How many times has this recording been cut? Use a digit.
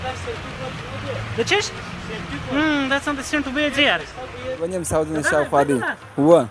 1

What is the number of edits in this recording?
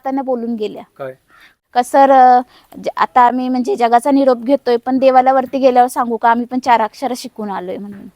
1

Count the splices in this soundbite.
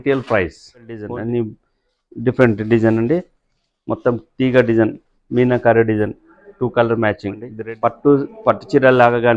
2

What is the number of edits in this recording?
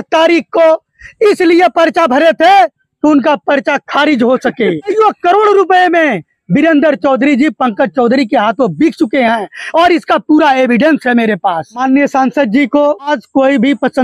3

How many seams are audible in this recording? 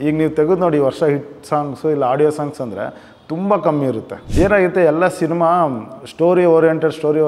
1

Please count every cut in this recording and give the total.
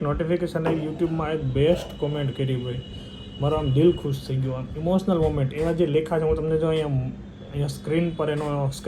0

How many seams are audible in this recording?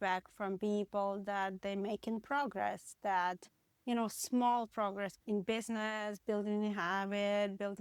1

